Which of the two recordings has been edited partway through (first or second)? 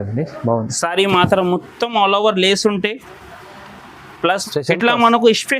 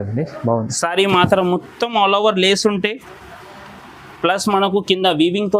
first